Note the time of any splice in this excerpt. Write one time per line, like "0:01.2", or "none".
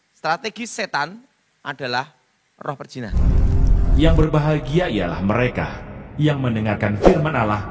0:03.1